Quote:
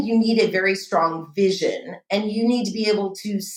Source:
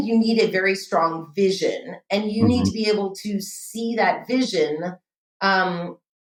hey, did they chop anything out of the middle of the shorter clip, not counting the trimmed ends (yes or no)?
no